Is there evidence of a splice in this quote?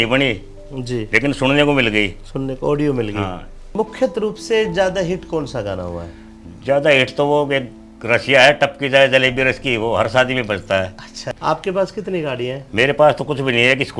yes; 2 cuts; at 3.7 s, 11.3 s

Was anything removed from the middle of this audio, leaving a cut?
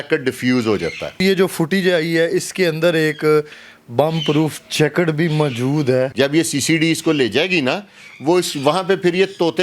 yes; 2 cuts; at 1.2 s, 6.1 s

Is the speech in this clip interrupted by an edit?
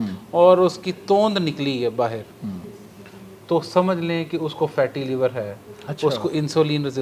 no; 0 cuts

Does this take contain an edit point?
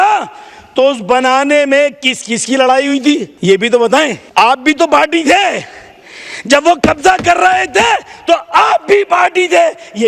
yes; 2 cuts; at 3.3 s, 4.2 s

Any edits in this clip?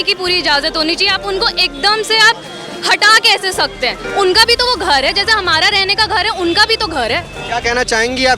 yes; 2 cuts; at 4.0 s, 7.3 s

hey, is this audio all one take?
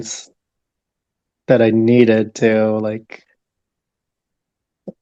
yes; 0 cuts

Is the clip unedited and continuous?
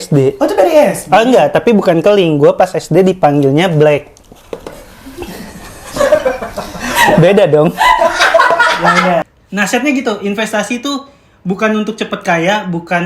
no; 1 cut; at 9.3 s

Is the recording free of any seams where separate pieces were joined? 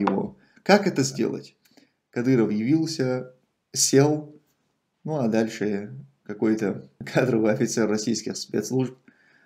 no; 2 cuts; at 1.5 s, 7.0 s

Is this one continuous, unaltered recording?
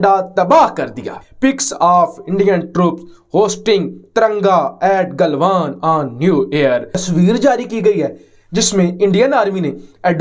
no; 2 cuts; at 1.2 s, 6.9 s

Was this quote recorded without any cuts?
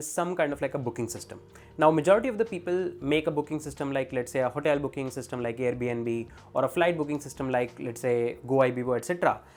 yes; 0 cuts

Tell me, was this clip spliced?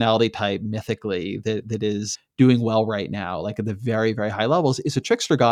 yes; 1 cut; at 2.1 s

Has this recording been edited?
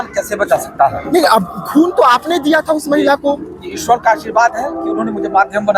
no; 0 cuts

